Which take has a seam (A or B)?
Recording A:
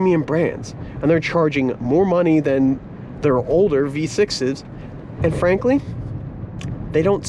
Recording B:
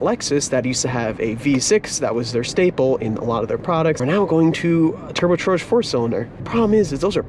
B